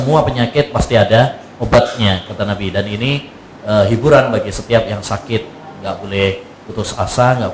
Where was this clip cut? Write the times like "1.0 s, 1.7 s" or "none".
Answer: none